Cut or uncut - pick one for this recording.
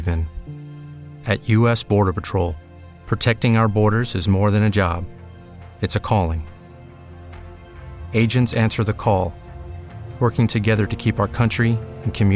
uncut